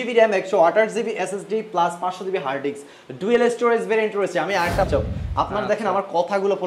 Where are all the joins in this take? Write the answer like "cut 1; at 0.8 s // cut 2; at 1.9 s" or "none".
cut 1; at 4.9 s